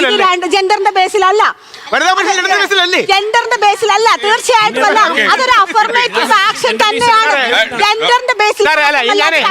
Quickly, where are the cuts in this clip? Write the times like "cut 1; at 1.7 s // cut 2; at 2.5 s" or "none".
cut 1; at 2.0 s